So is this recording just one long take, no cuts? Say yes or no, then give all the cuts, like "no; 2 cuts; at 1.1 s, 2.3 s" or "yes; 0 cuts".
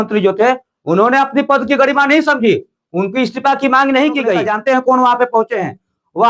no; 1 cut; at 4.4 s